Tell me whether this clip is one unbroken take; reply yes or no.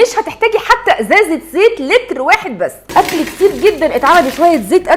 no